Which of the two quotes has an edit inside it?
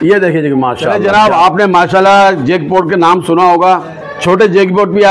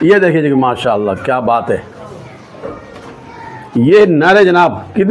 first; 1 cut; at 1.1 s

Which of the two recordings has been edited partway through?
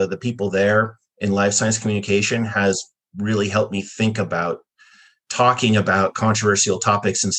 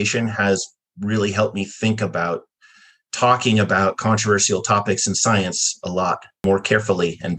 second; 1 cut; at 6.4 s

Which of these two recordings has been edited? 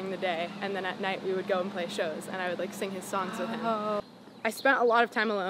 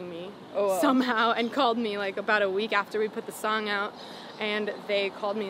first; 1 cut; at 4.0 s

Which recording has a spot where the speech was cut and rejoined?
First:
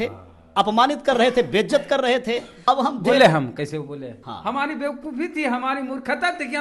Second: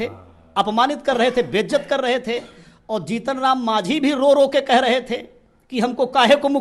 first; 2 cuts; at 2.5 s, 4.2 s

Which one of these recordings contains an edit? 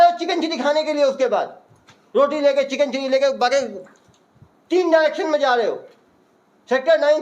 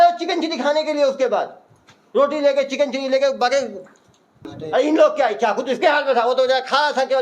second; 1 cut; at 4.5 s

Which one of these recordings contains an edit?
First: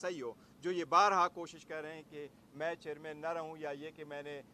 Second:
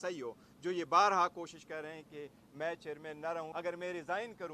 second; 1 cut; at 3.5 s

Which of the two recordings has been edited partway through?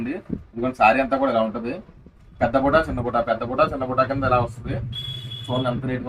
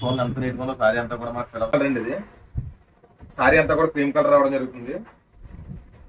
second; 1 cut; at 1.7 s

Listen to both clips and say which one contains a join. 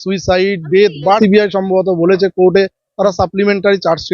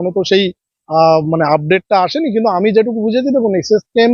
first; 1 cut; at 1.2 s

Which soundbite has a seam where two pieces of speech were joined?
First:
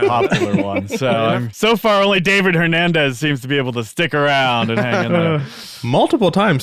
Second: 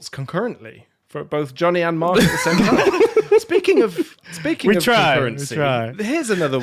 first; 1 cut; at 1.5 s

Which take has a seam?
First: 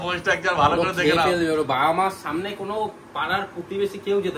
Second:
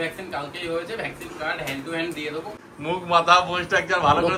second; 1 cut; at 2.5 s

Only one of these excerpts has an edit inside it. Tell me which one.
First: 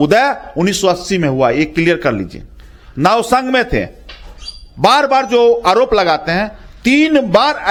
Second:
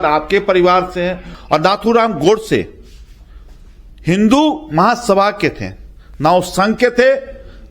second; 1 cut; at 1.2 s

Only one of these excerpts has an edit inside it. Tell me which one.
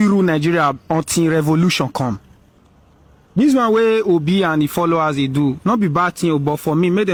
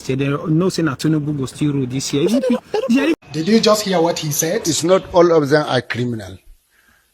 second; 1 cut; at 3.1 s

